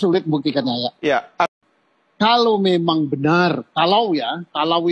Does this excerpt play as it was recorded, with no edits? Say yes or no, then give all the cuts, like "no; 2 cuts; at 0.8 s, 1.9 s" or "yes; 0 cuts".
no; 1 cut; at 1.5 s